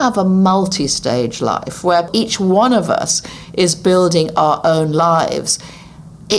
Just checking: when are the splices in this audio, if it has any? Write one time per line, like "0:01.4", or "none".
0:02.1